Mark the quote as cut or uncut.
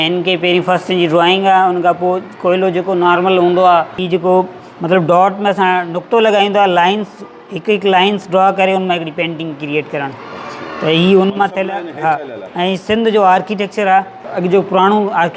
cut